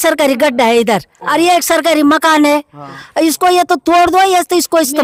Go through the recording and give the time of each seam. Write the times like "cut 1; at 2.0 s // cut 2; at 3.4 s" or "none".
none

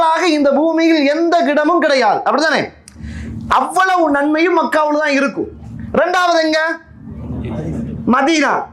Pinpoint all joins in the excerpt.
none

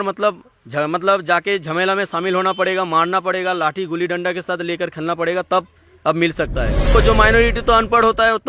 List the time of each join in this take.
cut 1; at 6.9 s

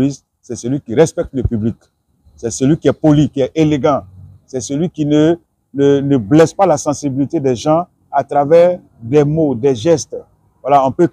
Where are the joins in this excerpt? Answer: none

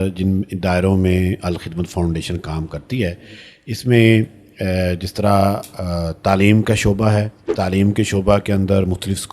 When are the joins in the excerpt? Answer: cut 1; at 7.4 s

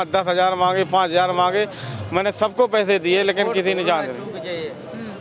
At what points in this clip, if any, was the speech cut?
none

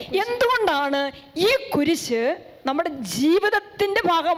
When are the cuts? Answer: none

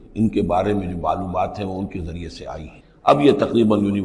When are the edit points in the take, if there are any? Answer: none

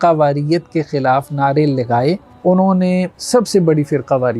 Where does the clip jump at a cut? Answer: cut 1; at 2.3 s // cut 2; at 3.2 s

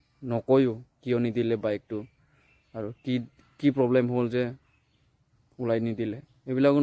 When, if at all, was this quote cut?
none

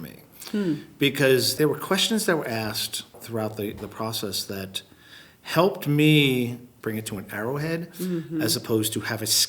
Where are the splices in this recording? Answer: cut 1; at 1.5 s // cut 2; at 3.2 s // cut 3; at 6.7 s

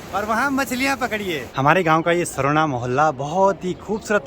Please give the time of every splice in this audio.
cut 1; at 1.5 s

